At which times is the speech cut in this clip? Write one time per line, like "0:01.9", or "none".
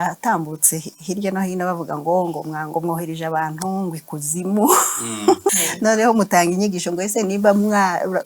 0:05.7